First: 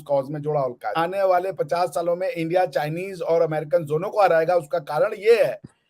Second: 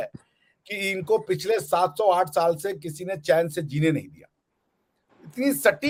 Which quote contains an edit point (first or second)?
first